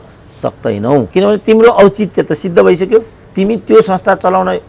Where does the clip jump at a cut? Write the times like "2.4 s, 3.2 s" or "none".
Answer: 1.1 s, 3.2 s